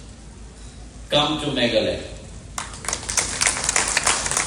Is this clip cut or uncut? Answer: uncut